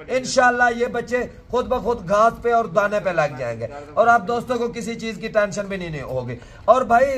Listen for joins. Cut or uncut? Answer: uncut